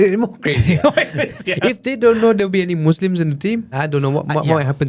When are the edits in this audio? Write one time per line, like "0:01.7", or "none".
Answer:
0:03.7